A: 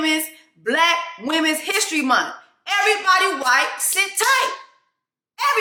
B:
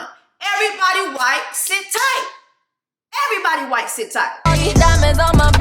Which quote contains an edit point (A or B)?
B